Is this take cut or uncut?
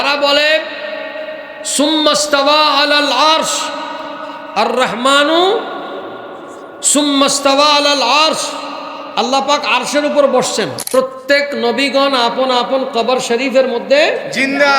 cut